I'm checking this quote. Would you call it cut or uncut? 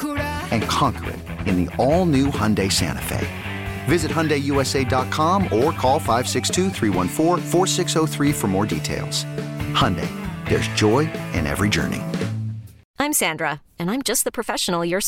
cut